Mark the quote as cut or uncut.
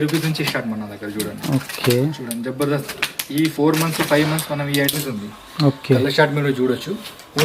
cut